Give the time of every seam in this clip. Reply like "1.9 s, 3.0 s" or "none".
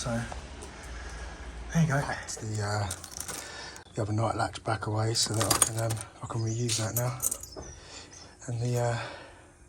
2.2 s